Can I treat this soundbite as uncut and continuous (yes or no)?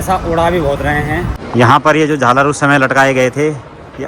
no